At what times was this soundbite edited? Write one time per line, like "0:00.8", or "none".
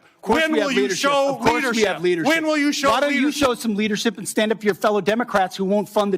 0:03.9